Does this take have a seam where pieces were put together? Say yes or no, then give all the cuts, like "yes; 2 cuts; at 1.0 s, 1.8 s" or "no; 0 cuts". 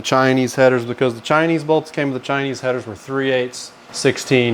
no; 0 cuts